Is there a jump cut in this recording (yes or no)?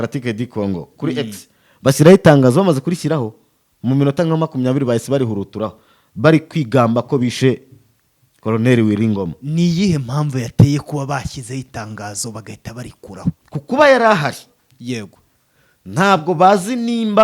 yes